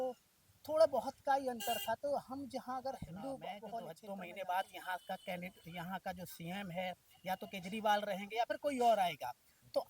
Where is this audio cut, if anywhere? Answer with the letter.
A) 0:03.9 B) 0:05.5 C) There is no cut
A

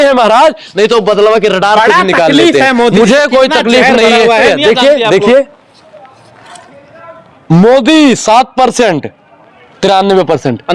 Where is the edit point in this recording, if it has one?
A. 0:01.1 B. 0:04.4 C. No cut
B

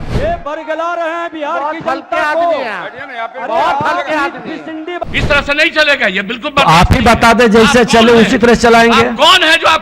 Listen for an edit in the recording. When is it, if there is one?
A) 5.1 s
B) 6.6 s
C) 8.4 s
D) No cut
A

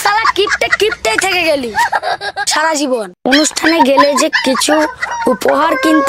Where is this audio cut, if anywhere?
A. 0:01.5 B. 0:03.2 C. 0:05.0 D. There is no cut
B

